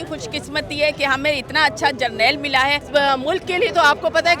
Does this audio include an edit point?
yes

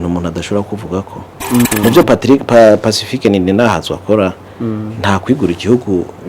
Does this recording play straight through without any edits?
no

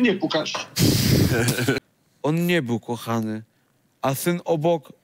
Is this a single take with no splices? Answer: no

